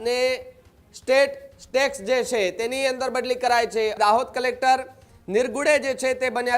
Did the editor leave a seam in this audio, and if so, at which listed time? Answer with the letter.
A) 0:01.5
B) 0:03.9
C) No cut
B